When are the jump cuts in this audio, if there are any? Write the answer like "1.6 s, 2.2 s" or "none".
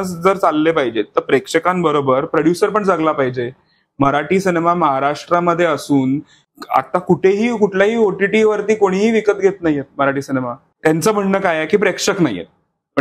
6.4 s, 10.6 s